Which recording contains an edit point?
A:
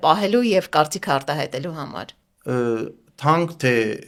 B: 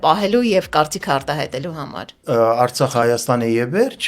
B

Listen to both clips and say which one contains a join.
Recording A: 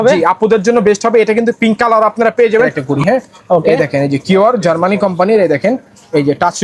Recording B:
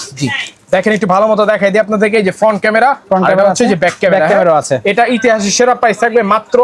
A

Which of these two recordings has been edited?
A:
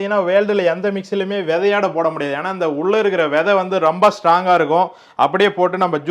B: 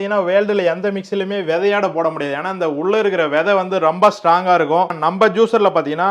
B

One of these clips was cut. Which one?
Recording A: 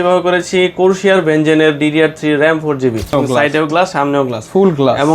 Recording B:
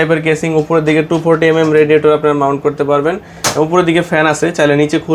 A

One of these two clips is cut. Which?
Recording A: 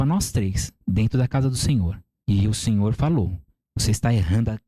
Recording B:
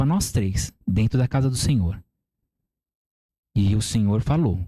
A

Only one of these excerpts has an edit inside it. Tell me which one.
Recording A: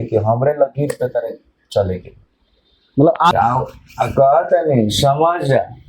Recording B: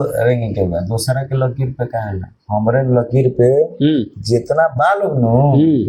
A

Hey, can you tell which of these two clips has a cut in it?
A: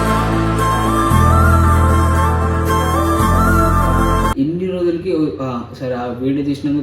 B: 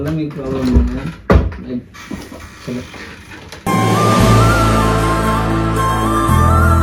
A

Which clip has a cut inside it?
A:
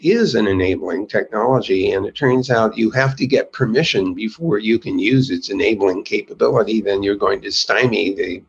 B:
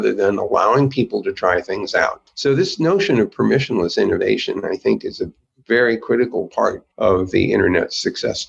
B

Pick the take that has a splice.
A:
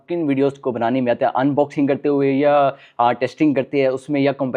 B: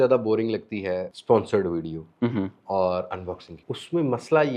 B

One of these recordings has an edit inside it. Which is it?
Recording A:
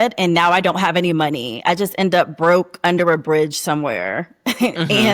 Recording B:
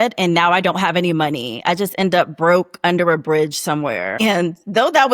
B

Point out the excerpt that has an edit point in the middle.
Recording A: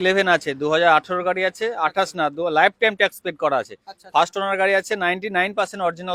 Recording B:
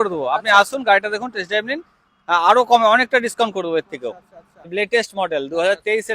B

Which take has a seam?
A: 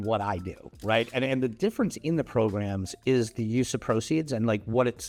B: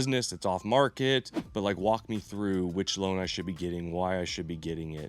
B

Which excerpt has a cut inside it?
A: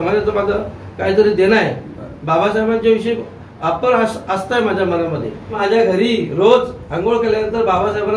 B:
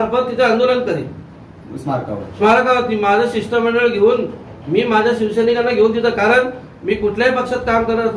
A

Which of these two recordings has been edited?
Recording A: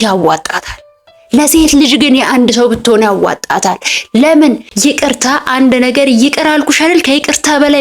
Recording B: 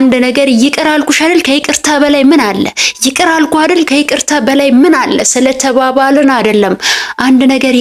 A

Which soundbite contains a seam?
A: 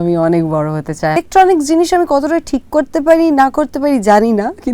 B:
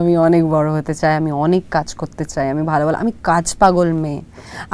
A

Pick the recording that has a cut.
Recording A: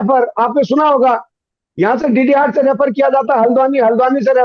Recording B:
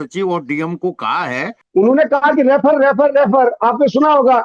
B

